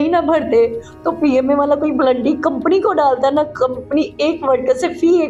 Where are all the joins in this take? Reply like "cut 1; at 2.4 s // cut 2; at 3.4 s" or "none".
none